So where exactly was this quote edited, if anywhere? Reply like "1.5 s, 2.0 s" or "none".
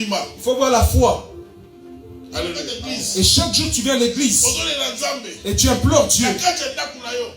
2.8 s

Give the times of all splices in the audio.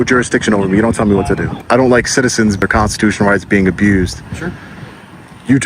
1.5 s, 2.6 s

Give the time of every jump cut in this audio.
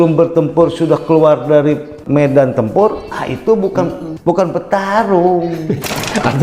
2.0 s, 4.1 s

